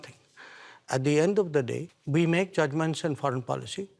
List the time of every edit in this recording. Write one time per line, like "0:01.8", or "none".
0:01.9